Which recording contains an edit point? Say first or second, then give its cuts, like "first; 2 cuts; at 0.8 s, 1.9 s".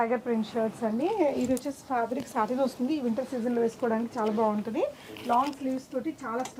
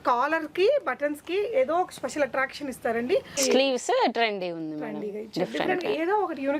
second; 1 cut; at 3.3 s